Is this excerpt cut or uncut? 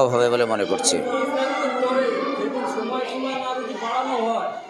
uncut